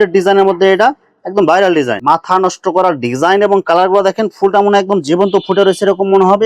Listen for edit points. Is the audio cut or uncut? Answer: cut